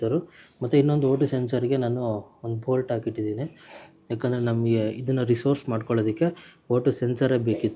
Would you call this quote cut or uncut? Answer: uncut